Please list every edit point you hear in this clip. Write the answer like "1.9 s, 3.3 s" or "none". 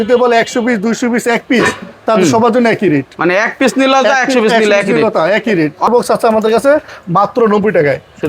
5.9 s